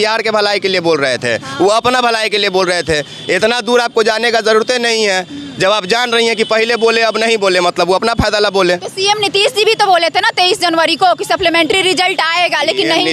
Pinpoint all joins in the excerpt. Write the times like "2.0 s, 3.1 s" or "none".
none